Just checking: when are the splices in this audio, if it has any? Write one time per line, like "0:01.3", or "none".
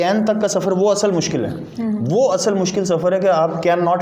none

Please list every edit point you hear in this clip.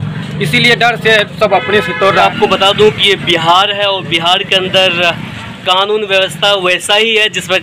0:02.2

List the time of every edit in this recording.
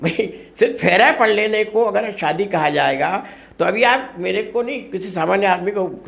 none

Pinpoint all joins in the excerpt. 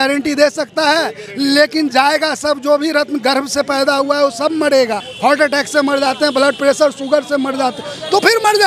0:05.1

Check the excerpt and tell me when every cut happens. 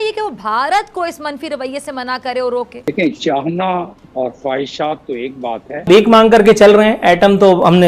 0:02.9
0:05.9

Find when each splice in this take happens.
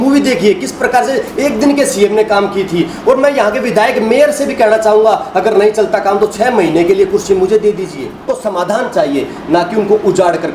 0:08.2

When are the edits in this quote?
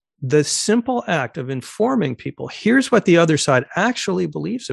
none

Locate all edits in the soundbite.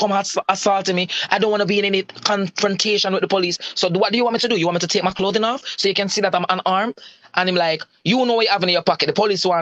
none

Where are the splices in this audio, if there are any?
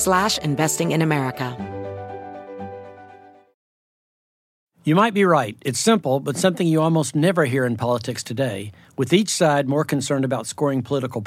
0:01.5

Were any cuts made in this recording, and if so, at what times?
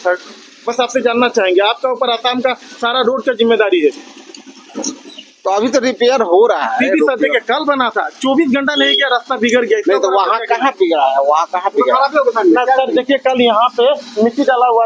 none

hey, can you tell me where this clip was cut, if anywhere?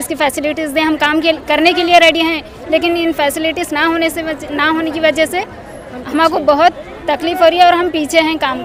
none

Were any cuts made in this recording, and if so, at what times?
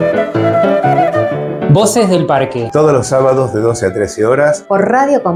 none

